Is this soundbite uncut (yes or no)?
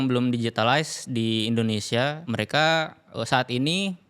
no